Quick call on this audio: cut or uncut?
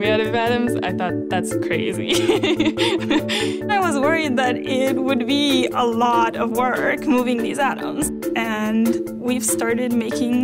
uncut